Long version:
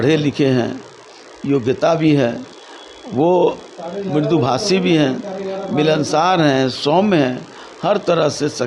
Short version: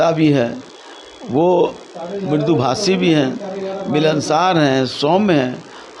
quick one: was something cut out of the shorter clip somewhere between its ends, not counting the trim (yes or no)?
no